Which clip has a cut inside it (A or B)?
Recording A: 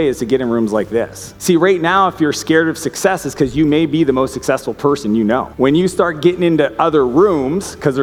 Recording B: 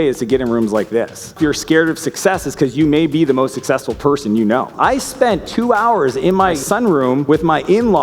B